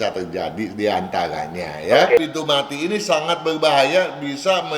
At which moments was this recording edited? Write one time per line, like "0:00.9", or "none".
0:02.2